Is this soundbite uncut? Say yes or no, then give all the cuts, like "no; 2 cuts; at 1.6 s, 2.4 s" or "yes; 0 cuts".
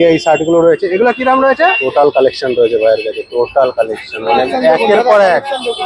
no; 1 cut; at 1.8 s